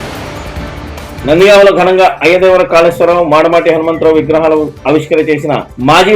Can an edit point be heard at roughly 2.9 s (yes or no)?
no